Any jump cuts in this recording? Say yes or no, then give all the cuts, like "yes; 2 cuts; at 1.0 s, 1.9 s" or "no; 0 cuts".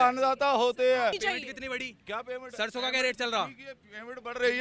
no; 0 cuts